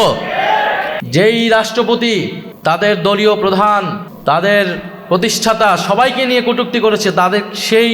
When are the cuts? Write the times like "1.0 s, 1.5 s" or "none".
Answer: 0.9 s, 2.4 s, 4.0 s